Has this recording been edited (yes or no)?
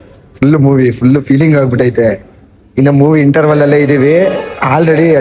no